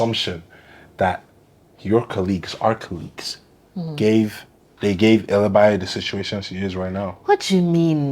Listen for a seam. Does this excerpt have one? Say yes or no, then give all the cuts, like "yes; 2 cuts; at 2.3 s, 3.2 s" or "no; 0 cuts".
yes; 1 cut; at 4.7 s